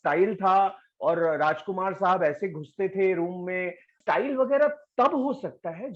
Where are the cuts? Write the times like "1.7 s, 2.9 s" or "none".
4.0 s